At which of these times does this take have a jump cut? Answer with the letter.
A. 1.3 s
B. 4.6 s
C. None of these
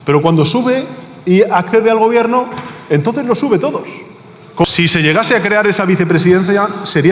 B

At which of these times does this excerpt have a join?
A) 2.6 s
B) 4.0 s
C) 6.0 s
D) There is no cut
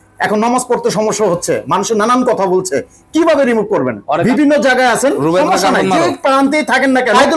D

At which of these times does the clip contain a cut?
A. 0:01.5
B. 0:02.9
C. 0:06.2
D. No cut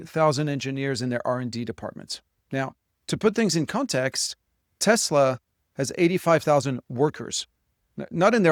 D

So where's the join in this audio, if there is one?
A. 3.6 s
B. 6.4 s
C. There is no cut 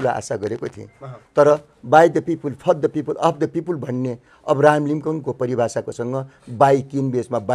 C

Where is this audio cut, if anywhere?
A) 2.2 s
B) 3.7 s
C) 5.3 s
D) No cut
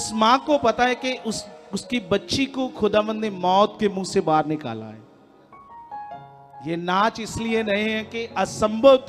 D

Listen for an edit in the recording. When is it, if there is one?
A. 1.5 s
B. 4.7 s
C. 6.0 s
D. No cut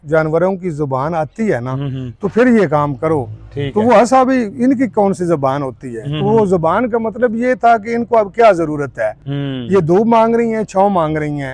D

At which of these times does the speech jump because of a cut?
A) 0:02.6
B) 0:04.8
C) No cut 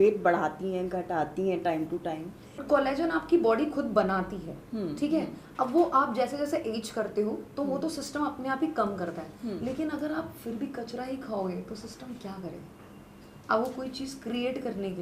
A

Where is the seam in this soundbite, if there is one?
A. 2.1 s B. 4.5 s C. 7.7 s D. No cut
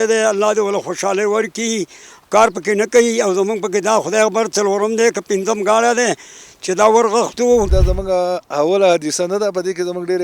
C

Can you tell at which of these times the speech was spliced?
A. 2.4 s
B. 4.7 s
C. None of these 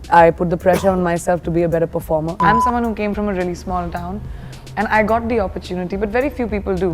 A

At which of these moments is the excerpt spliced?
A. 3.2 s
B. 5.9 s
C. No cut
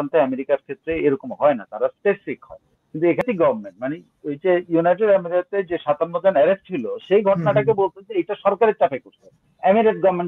A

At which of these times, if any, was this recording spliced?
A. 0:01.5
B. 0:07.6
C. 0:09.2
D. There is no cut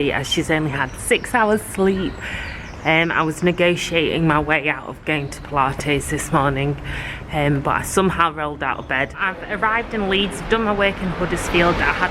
C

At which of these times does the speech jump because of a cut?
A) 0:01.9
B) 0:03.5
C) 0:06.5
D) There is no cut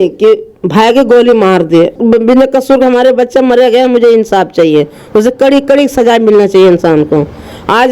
A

